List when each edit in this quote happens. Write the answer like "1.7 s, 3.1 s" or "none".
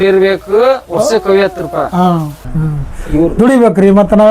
2.5 s